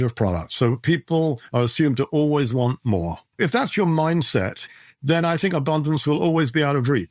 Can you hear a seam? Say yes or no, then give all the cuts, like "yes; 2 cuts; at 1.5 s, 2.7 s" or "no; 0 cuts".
yes; 2 cuts; at 3.2 s, 4.6 s